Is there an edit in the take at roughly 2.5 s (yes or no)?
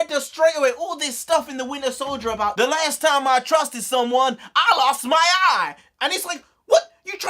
yes